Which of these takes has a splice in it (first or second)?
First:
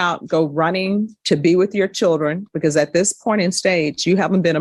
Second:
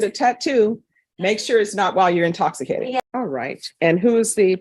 second